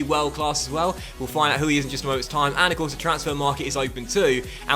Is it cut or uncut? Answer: uncut